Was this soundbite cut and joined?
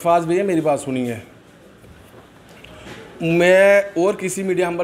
no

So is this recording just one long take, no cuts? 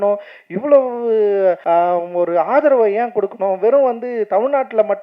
no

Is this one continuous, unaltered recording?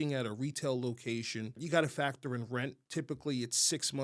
no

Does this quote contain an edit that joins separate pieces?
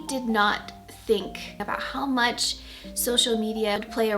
yes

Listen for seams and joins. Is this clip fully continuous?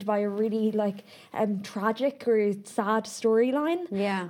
yes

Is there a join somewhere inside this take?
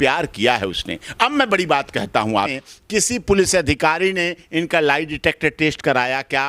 yes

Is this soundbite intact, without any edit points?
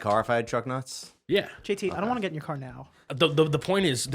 no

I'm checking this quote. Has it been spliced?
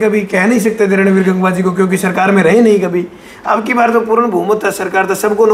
no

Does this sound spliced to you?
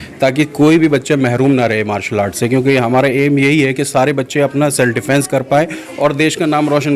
no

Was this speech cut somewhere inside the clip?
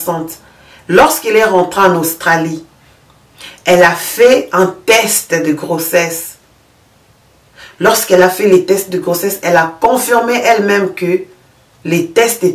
no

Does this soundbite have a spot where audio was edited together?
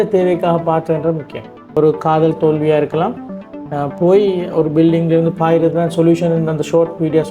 yes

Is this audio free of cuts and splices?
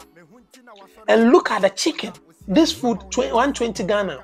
yes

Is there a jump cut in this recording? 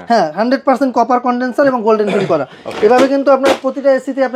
no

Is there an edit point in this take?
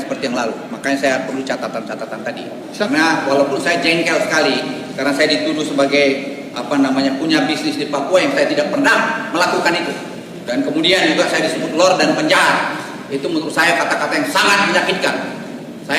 yes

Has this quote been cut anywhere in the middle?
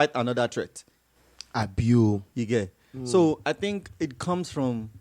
no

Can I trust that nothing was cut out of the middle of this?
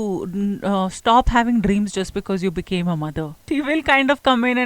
no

